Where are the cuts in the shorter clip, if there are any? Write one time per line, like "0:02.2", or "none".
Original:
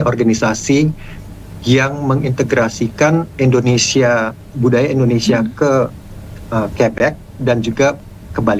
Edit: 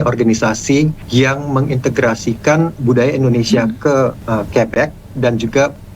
0:01.0
0:02.7
0:04.2